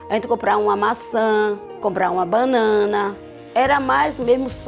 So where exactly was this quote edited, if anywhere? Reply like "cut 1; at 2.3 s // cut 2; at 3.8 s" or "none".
cut 1; at 1.8 s // cut 2; at 3.4 s